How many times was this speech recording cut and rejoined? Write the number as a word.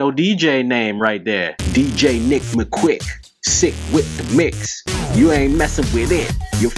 one